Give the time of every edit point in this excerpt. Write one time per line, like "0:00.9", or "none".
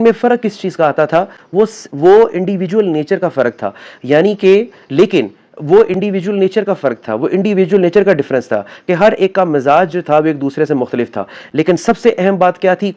none